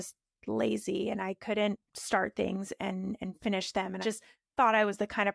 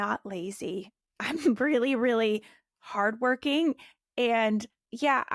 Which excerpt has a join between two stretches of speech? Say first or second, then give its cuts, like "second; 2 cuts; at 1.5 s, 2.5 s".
first; 1 cut; at 4.0 s